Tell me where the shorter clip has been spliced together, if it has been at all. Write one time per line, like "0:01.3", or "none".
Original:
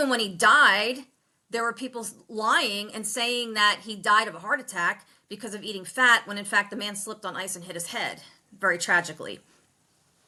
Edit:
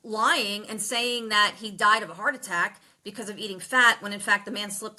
none